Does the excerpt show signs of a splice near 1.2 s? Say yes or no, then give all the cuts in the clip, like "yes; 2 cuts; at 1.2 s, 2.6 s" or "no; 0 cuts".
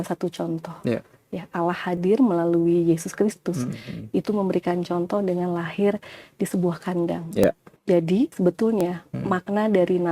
no; 2 cuts; at 7.4 s, 8.3 s